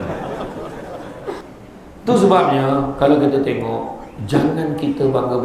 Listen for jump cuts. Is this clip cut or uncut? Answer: cut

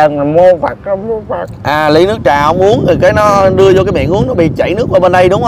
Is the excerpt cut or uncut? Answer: uncut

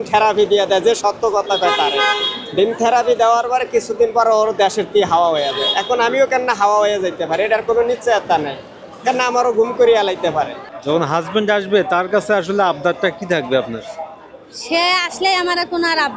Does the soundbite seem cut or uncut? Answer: cut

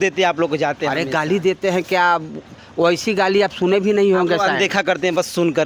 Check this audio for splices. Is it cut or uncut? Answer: uncut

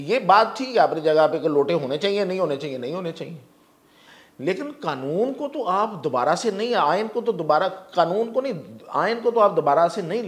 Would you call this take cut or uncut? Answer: uncut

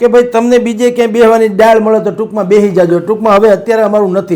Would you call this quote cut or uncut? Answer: uncut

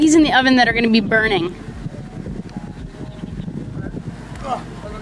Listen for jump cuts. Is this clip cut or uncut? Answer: uncut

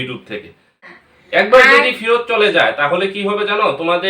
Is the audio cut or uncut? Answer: cut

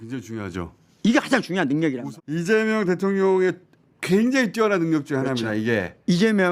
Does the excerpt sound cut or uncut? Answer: cut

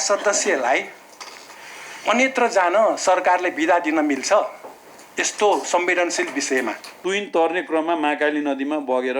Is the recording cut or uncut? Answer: cut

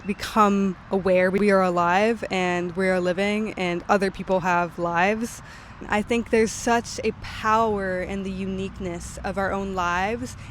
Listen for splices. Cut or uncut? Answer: cut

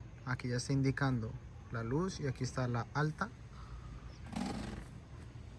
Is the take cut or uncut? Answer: uncut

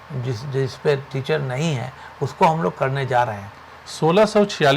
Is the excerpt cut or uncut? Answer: uncut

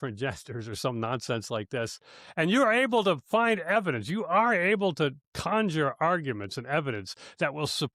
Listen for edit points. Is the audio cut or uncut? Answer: uncut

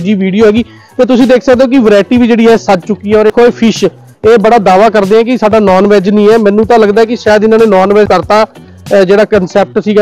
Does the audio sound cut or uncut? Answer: cut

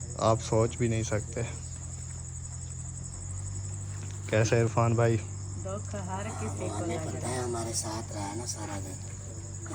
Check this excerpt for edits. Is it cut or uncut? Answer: uncut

